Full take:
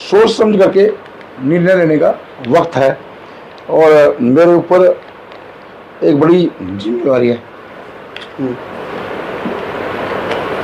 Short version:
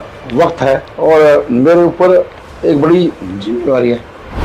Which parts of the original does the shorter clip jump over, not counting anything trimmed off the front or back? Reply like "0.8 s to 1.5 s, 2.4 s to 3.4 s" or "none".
3.0 s to 3.6 s, 5.1 s to 5.8 s